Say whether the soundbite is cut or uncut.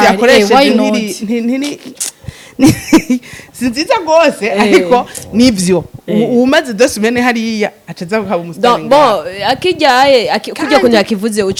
uncut